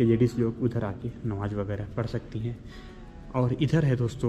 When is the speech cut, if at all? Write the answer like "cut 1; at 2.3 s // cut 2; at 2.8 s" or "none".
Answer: none

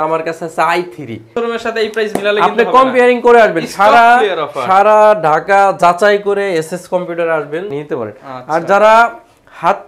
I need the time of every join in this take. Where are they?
cut 1; at 1.3 s // cut 2; at 7.7 s

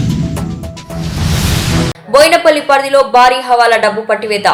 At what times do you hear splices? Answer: none

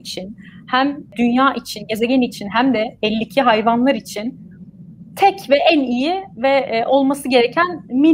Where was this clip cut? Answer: cut 1; at 1.1 s

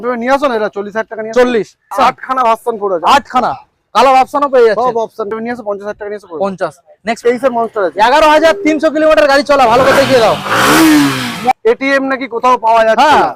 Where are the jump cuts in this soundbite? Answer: cut 1; at 1.9 s // cut 2; at 5.3 s // cut 3; at 7.2 s // cut 4; at 11.5 s

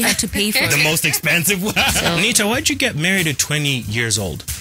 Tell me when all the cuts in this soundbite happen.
cut 1; at 2.0 s

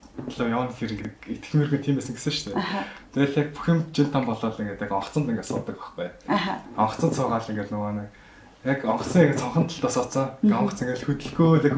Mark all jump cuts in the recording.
cut 1; at 1.0 s

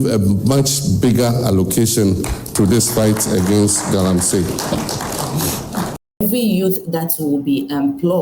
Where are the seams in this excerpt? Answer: cut 1; at 6.0 s

